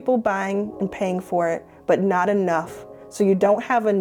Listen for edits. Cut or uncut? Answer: uncut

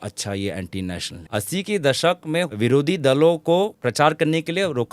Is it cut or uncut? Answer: cut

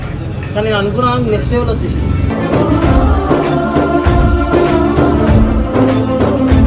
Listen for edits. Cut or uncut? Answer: uncut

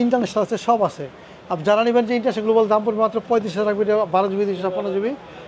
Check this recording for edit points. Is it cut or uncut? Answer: uncut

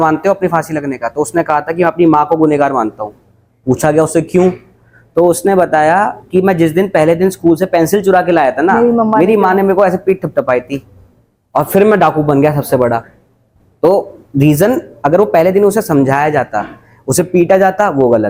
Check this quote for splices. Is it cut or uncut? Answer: uncut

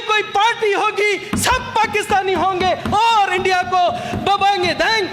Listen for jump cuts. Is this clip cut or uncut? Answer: uncut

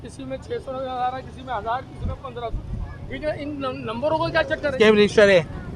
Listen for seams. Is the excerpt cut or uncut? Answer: cut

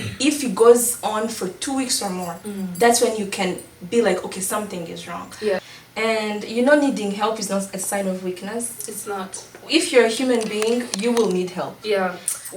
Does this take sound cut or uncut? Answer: cut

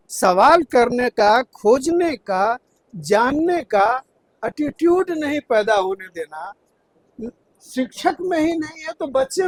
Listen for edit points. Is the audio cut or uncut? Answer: uncut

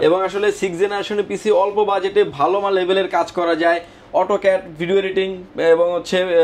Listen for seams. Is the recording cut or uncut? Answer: uncut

